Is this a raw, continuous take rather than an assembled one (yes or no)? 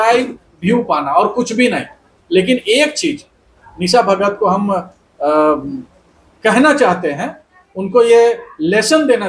yes